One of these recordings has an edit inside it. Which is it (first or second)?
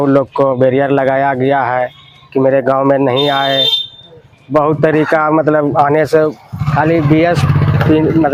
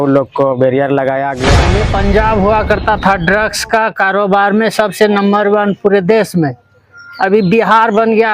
second